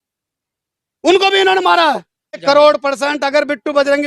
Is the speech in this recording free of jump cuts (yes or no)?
no